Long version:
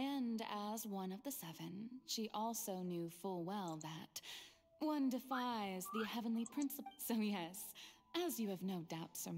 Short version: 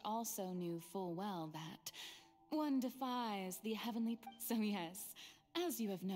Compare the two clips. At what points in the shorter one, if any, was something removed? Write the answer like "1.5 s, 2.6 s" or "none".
4.2 s